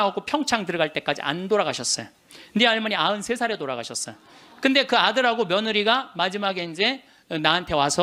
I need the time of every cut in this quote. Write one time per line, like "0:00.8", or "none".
none